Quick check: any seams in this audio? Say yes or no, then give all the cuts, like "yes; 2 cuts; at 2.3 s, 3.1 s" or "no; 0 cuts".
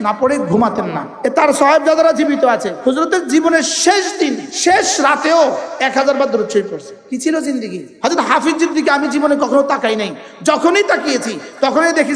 yes; 5 cuts; at 1.1 s, 2.7 s, 4.5 s, 6.9 s, 7.8 s